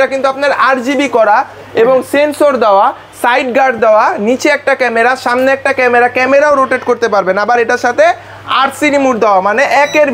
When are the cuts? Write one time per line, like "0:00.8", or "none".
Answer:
none